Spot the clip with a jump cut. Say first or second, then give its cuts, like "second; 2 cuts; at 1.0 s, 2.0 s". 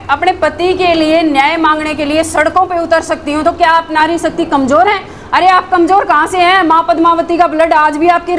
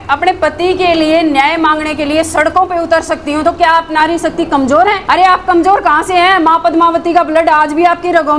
second; 1 cut; at 5.0 s